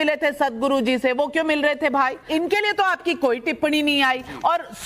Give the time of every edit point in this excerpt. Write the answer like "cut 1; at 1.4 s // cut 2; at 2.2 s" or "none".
cut 1; at 2.2 s